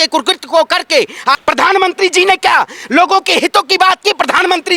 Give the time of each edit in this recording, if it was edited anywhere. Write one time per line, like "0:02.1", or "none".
0:01.4